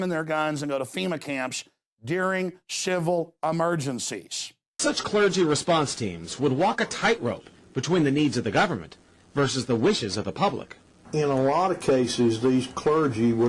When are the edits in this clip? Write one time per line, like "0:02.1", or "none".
none